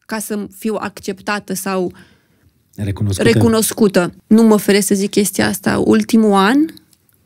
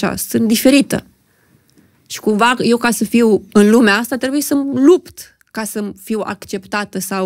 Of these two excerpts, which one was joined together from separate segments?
first; 1 cut; at 4.2 s

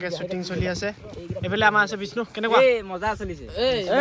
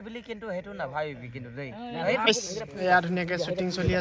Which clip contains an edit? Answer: second; 1 cut; at 2.3 s

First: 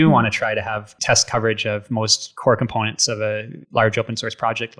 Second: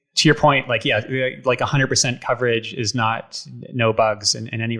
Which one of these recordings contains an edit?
first; 3 cuts; at 0.9 s, 2.2 s, 3.5 s

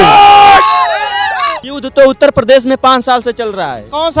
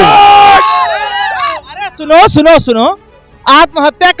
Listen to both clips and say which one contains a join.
first; 1 cut; at 1.7 s

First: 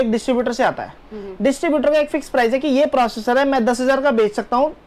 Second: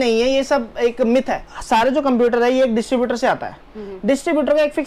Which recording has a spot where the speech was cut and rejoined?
second; 1 cut; at 1.5 s

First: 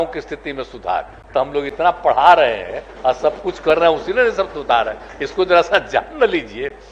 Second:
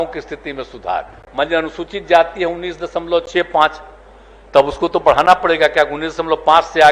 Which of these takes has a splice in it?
second; 1 cut; at 1.2 s

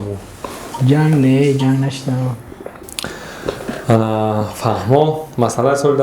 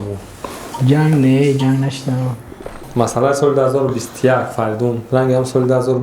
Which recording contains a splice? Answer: second; 1 cut; at 2.8 s

